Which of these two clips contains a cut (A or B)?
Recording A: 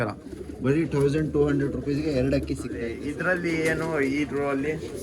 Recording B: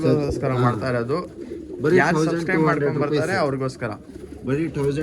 A